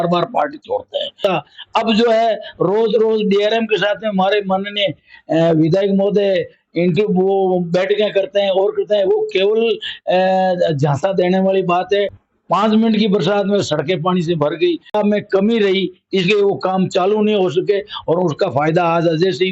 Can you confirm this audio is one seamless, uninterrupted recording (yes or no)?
no